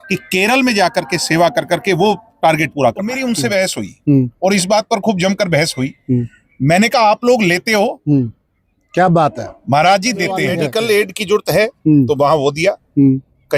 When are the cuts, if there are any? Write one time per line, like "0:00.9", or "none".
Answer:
0:03.1
0:10.7